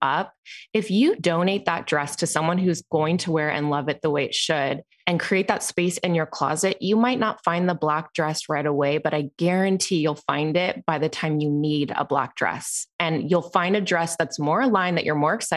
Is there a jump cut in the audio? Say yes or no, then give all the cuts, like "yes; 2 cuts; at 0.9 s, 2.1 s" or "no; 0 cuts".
yes; 2 cuts; at 1.2 s, 4.9 s